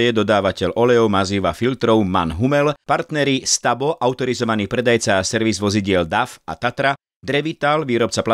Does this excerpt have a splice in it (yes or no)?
yes